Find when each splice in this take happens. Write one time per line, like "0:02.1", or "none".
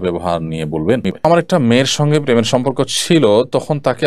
0:01.2